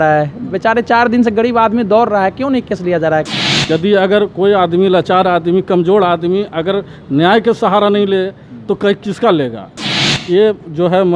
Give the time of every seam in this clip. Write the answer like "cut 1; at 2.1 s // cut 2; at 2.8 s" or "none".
cut 1; at 3.6 s // cut 2; at 10.1 s